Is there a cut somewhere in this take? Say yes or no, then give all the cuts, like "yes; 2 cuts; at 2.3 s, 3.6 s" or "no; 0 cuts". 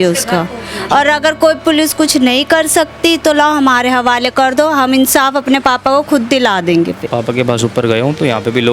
yes; 1 cut; at 7.0 s